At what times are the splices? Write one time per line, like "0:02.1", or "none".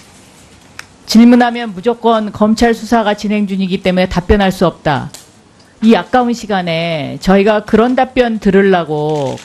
none